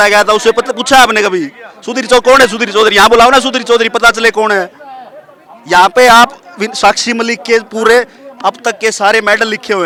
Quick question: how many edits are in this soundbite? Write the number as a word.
zero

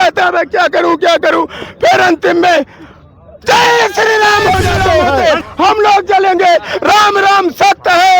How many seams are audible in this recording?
one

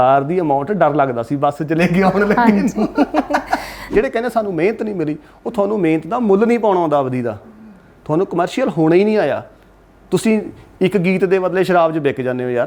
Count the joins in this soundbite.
one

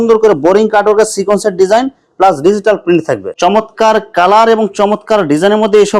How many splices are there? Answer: one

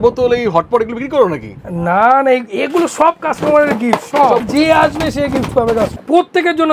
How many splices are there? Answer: two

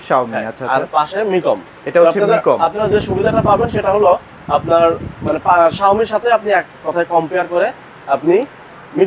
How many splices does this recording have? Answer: zero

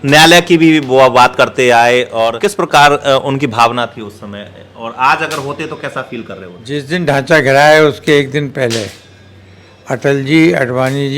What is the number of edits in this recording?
two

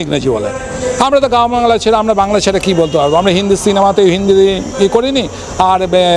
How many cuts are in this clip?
zero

